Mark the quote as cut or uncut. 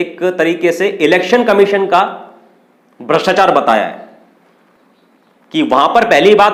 uncut